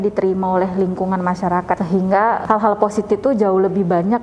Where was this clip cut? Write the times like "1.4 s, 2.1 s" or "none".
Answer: 1.8 s